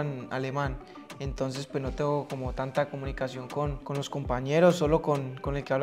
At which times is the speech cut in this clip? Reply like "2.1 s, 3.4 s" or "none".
3.8 s

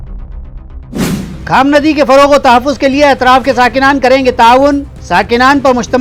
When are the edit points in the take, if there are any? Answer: 1.0 s

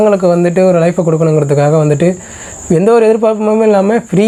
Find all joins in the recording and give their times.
none

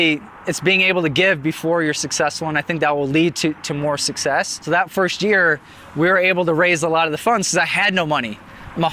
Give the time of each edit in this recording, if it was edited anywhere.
4.6 s

